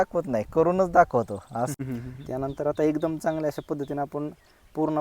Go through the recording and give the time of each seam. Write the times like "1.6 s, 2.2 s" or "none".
1.7 s